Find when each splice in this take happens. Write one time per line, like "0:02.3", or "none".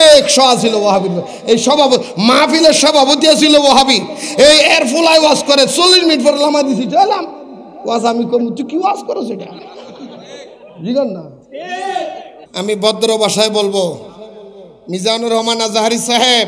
0:12.4

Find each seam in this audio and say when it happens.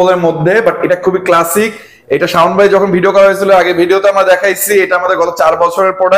none

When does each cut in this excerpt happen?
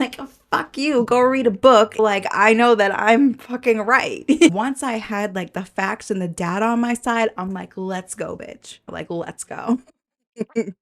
0:02.0
0:04.5
0:08.9

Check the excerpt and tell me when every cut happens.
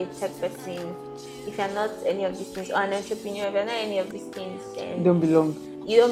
none

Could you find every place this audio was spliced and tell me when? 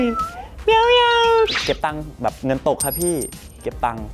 0:01.5

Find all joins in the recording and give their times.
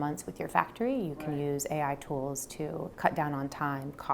0:02.9

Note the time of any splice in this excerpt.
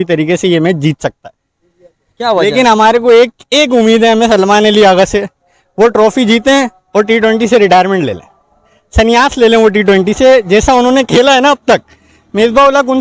none

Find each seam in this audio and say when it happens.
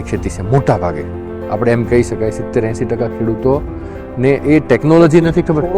none

